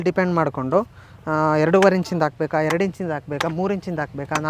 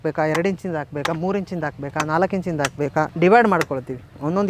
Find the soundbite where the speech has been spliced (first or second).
second